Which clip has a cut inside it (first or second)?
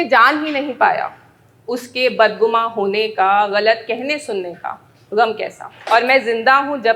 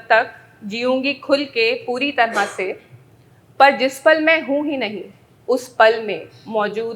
first